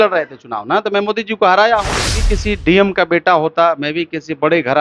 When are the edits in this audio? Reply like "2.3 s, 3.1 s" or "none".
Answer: 2.3 s